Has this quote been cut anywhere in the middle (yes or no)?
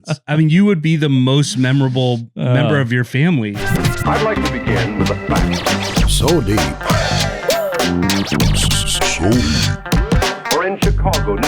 yes